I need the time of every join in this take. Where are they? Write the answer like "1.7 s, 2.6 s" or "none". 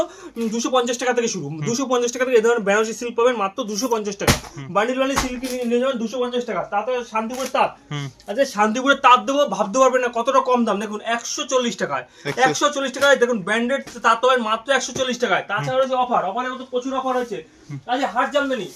none